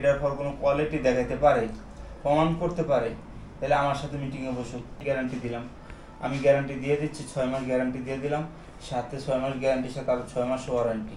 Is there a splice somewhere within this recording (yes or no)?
yes